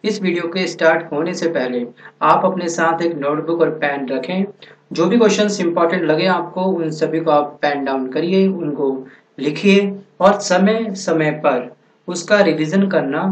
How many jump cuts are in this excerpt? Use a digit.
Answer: 1